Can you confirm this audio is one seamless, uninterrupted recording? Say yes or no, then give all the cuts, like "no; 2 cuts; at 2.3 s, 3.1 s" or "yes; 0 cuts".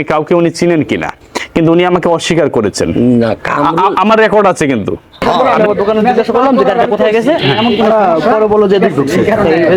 no; 1 cut; at 5.3 s